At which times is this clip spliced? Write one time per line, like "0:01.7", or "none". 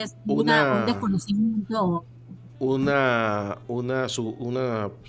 none